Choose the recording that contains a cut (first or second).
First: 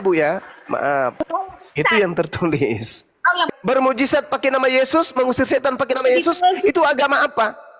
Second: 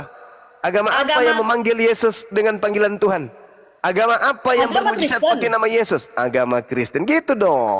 first